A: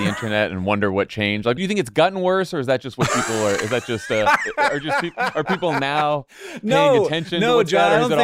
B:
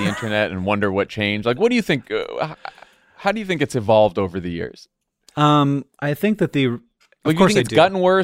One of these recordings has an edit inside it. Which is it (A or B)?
A